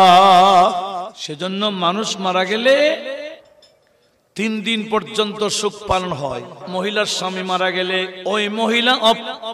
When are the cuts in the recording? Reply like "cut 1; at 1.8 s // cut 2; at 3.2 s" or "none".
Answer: cut 1; at 1.2 s // cut 2; at 6.7 s // cut 3; at 8.1 s